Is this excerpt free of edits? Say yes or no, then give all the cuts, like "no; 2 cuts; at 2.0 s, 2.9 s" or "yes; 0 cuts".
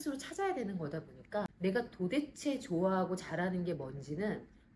no; 1 cut; at 1.5 s